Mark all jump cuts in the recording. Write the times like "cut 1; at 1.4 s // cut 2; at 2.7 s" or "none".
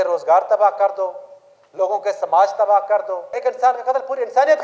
cut 1; at 3.4 s